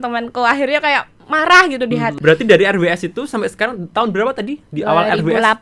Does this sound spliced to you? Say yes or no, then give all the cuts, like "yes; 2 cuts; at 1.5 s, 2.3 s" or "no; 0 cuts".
yes; 1 cut; at 2.2 s